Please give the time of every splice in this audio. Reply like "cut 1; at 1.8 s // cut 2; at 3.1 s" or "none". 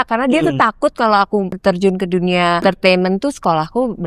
cut 1; at 1.5 s // cut 2; at 2.6 s